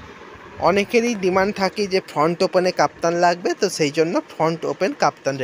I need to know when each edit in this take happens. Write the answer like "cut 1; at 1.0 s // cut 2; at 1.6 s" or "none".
none